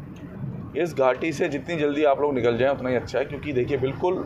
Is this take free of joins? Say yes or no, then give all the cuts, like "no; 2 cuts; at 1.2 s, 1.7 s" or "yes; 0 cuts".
yes; 0 cuts